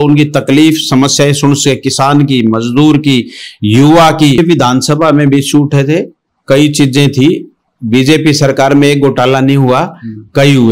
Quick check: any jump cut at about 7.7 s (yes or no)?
no